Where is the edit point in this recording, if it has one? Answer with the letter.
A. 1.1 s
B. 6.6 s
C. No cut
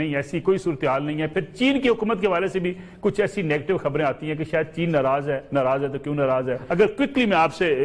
C